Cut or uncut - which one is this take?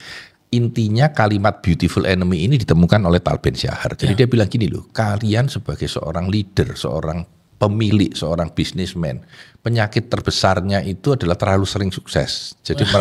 uncut